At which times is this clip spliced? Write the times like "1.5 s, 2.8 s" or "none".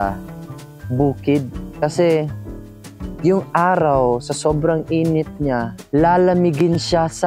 1.6 s, 5.8 s